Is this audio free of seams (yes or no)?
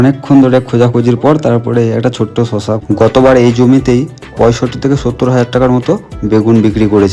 no